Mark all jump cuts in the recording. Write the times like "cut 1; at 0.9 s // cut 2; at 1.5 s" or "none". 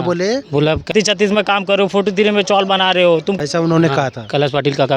cut 1; at 0.9 s // cut 2; at 3.4 s

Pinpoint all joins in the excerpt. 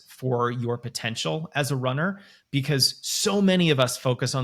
none

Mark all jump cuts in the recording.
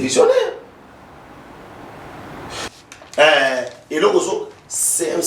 cut 1; at 2.7 s

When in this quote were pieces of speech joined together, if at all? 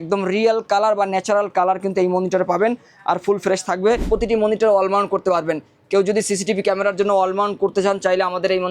cut 1; at 4.0 s

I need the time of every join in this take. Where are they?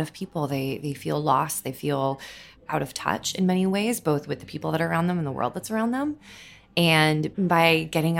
cut 1; at 2.7 s

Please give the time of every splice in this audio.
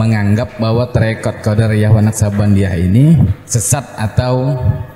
cut 1; at 3.5 s

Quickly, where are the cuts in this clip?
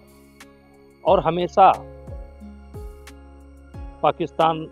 cut 1; at 2.4 s // cut 2; at 4.0 s

